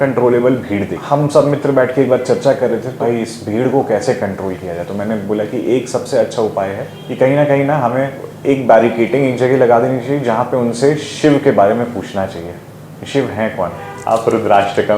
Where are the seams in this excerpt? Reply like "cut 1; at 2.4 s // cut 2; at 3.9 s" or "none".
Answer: cut 1; at 0.9 s // cut 2; at 2.9 s // cut 3; at 13.9 s